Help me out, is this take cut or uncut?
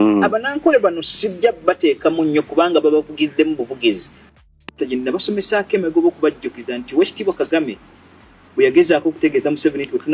cut